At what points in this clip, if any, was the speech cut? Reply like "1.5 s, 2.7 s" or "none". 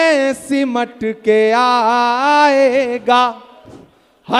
none

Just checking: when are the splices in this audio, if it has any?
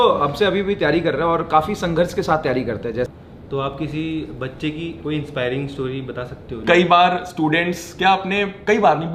3.1 s, 6.6 s

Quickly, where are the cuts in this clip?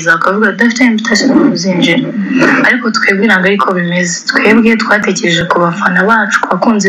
none

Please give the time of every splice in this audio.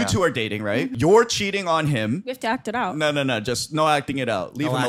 0.9 s, 2.3 s

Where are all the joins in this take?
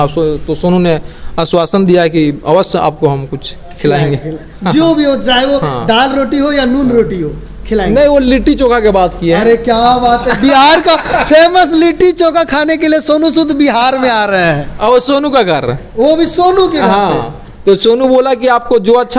none

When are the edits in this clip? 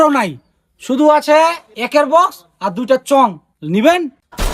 1.7 s, 3.5 s

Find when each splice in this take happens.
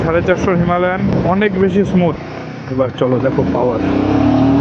1.1 s, 2.2 s

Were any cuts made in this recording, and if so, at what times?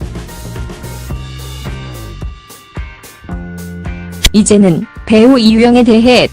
2.9 s

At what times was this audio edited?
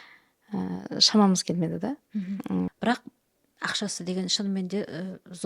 2.7 s

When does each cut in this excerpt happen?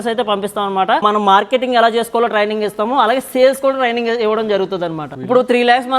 1.0 s, 5.1 s

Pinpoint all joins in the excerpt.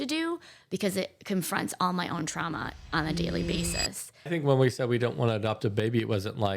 4.2 s

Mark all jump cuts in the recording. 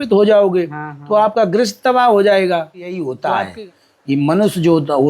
3.0 s

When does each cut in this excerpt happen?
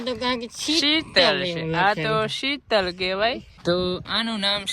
3.5 s

